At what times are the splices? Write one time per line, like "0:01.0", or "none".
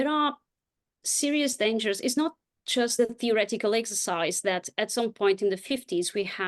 0:03.0